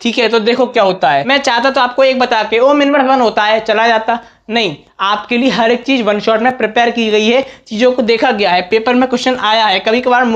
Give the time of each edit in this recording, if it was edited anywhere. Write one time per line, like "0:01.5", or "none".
0:01.2